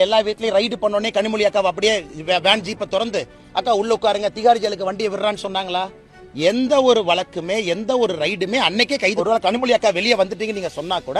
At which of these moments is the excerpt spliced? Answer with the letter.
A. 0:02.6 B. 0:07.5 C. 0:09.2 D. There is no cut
C